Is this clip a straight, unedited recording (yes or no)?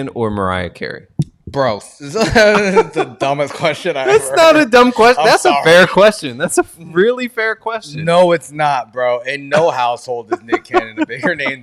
yes